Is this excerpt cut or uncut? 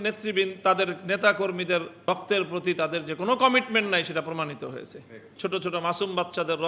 cut